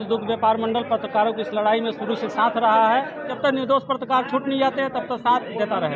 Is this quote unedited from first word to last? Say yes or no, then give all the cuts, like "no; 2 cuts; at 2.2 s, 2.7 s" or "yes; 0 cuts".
no; 1 cut; at 3.3 s